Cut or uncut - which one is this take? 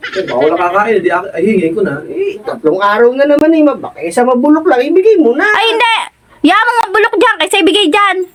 uncut